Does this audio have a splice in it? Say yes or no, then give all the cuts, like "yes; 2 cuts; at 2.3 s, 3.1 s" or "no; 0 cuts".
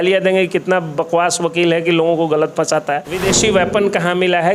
yes; 1 cut; at 3.1 s